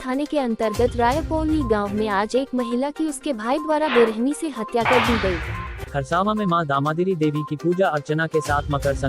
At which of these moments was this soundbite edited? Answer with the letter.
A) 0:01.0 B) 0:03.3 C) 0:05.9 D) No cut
C